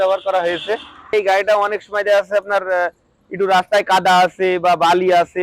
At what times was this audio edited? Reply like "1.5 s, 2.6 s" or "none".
1.1 s